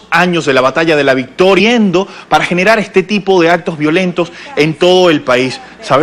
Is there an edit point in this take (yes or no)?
no